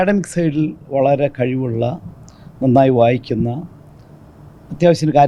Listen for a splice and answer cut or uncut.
uncut